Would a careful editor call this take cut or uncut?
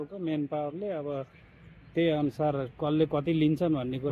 uncut